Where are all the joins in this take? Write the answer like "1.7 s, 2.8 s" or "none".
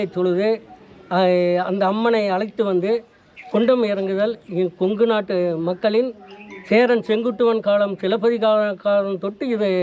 none